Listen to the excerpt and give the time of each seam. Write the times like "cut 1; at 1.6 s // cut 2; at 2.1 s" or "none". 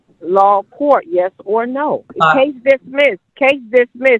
cut 1; at 2.1 s // cut 2; at 3.3 s